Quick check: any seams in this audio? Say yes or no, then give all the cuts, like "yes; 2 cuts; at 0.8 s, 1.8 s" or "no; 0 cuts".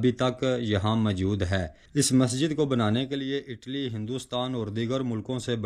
yes; 1 cut; at 1.8 s